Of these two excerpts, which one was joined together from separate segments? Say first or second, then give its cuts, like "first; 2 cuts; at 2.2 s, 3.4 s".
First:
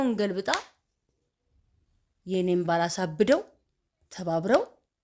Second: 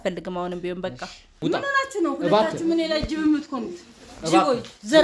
second; 1 cut; at 1.3 s